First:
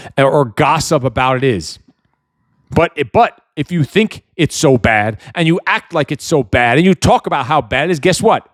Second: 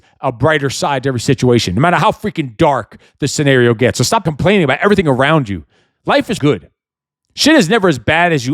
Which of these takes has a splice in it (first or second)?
second